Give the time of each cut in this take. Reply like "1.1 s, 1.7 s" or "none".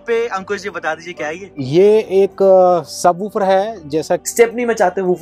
4.2 s